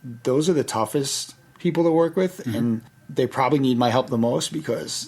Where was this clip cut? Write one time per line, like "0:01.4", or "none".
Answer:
0:02.9